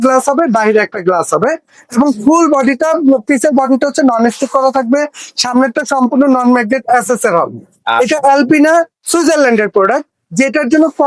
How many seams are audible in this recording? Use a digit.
0